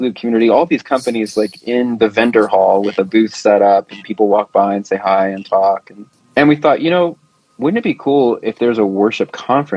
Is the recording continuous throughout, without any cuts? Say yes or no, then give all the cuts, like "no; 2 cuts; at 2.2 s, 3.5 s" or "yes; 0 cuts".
yes; 0 cuts